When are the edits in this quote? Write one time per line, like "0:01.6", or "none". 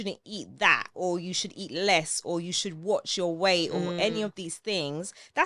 none